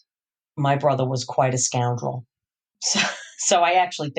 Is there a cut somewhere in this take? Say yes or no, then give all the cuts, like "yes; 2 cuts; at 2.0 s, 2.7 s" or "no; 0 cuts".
yes; 1 cut; at 2.8 s